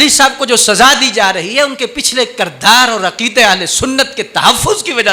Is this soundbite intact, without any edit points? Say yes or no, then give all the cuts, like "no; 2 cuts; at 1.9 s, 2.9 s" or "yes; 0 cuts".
yes; 0 cuts